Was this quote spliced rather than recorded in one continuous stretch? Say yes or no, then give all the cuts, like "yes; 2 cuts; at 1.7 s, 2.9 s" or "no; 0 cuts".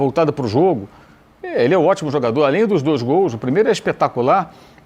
no; 0 cuts